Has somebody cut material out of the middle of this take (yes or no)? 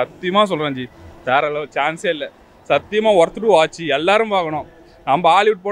no